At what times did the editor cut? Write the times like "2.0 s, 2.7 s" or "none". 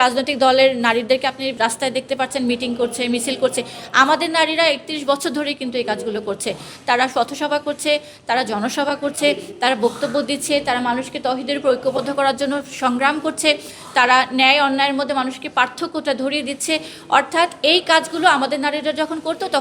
1.5 s

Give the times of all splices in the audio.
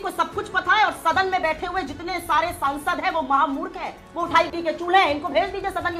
none

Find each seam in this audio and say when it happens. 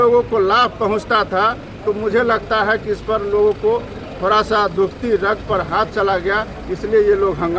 none

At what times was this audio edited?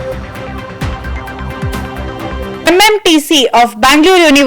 none

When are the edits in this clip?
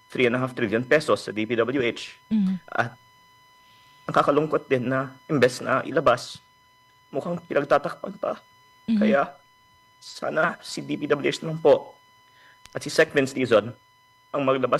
none

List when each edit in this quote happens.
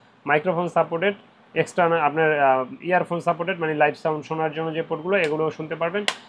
none

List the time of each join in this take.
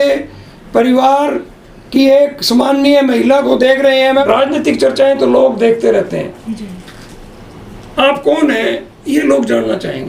4.2 s

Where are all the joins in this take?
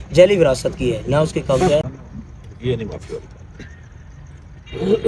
1.8 s

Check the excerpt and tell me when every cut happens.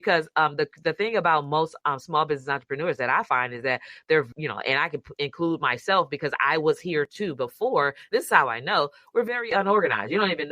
4.4 s

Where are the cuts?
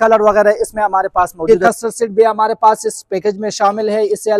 1.4 s

